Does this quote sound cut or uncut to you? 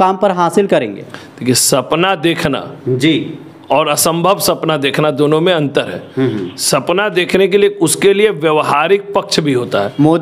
uncut